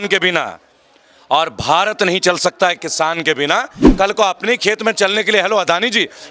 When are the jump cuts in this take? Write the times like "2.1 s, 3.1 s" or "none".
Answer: 3.8 s